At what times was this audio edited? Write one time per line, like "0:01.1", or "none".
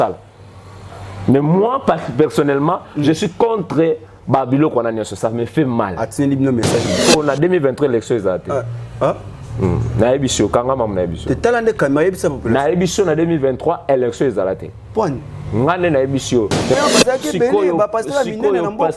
0:06.8
0:16.7